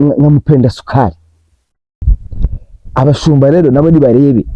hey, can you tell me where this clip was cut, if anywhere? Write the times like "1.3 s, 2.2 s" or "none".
2.0 s

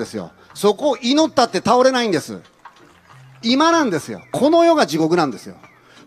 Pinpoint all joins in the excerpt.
3.3 s

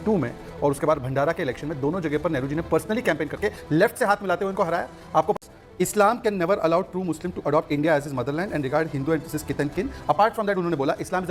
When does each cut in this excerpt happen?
5.4 s

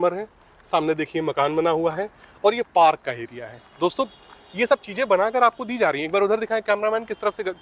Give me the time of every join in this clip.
none

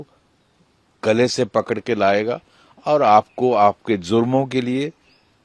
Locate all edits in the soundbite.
none

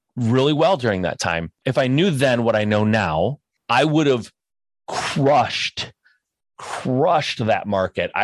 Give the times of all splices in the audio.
1.6 s, 3.5 s

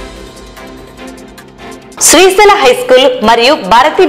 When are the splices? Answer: none

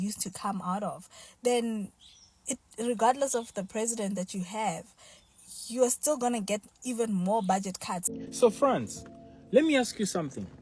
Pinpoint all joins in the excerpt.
8.0 s

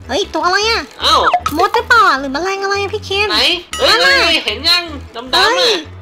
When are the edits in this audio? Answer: 1.4 s

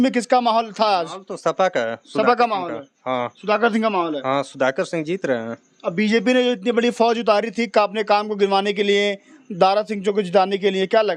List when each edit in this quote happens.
none

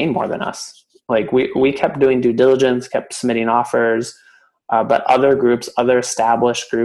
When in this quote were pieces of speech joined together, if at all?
none

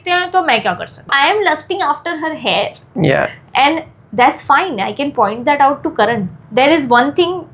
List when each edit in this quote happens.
1.1 s, 6.4 s

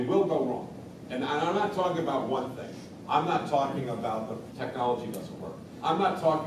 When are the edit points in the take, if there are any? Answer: none

